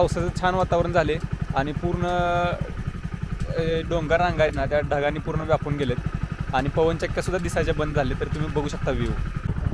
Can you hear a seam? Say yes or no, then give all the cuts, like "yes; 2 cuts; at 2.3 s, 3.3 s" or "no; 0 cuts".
no; 0 cuts